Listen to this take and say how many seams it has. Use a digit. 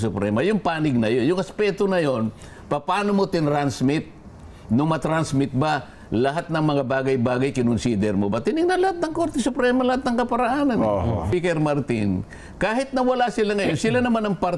1